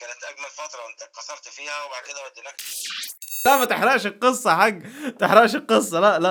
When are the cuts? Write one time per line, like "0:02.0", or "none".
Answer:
none